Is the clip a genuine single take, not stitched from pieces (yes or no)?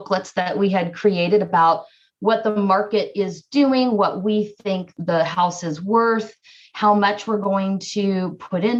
yes